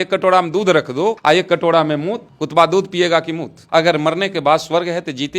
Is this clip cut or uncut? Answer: cut